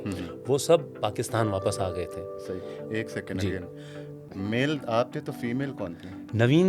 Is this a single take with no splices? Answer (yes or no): yes